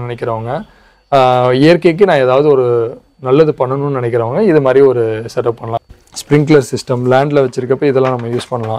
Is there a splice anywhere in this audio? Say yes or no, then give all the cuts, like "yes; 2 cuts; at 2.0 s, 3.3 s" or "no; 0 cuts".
yes; 1 cut; at 5.7 s